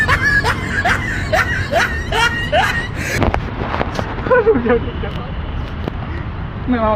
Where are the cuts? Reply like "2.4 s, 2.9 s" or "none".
none